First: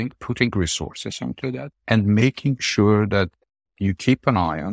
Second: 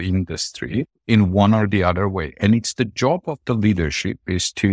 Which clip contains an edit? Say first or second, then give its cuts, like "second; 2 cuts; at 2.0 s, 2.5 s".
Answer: second; 1 cut; at 1.0 s